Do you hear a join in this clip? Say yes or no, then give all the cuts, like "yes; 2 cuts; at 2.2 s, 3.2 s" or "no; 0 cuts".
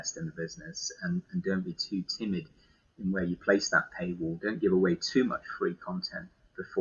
no; 0 cuts